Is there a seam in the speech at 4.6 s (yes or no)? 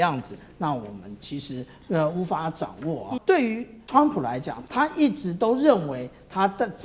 yes